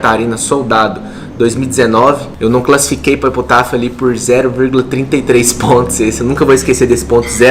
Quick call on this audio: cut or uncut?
uncut